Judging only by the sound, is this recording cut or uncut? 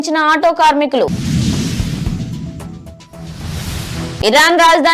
uncut